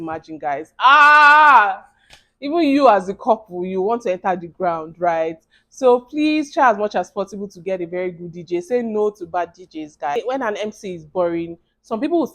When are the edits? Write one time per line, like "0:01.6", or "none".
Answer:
0:10.2

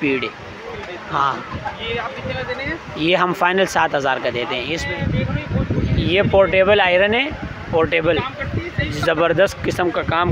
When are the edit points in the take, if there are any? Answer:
0:04.8

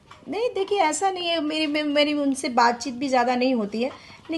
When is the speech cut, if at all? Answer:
none

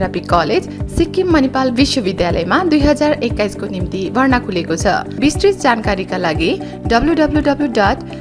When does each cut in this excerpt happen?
0:05.1

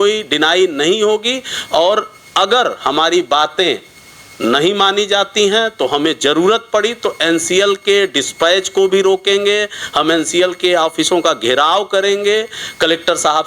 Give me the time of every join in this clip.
none

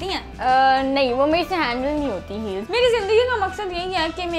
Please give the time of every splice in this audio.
0:02.7

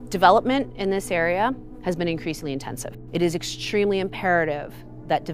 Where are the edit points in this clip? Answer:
0:02.9

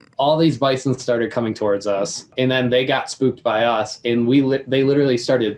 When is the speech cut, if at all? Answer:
none

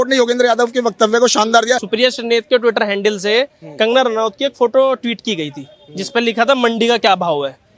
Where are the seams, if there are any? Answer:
0:01.9

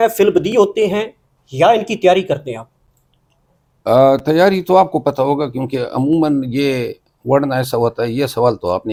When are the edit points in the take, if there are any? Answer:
none

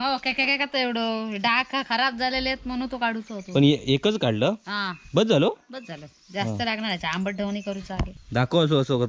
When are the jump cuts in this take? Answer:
0:08.2

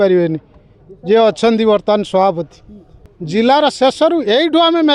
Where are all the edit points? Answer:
0:03.2

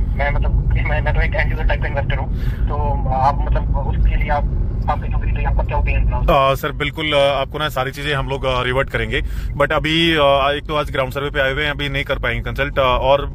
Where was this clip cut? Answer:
none

